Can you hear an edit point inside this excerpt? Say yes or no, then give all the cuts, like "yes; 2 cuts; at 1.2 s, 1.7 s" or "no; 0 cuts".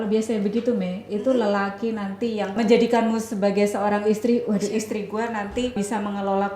yes; 2 cuts; at 2.6 s, 5.7 s